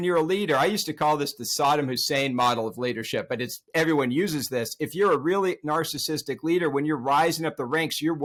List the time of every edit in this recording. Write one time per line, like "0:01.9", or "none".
none